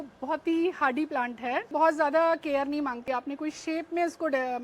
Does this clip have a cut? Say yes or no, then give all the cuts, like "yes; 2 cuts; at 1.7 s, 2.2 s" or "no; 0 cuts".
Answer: yes; 2 cuts; at 1.7 s, 3.0 s